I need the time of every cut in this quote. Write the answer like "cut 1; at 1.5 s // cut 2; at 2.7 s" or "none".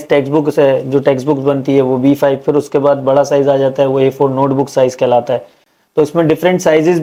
none